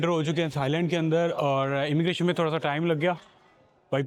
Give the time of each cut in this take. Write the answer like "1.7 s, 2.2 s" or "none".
none

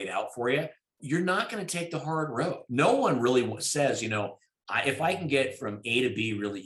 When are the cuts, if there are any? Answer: 1.0 s, 2.6 s

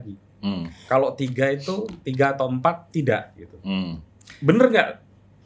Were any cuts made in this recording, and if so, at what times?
none

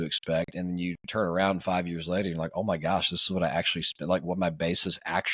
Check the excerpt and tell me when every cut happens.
none

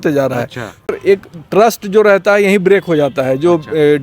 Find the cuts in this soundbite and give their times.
1.0 s

